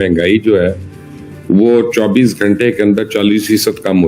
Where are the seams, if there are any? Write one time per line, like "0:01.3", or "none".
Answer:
none